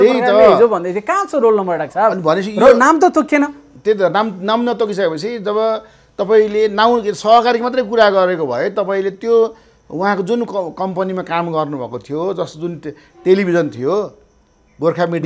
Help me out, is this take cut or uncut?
uncut